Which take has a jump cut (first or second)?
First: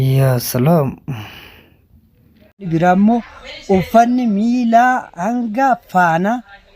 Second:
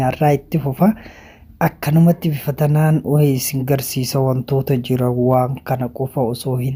first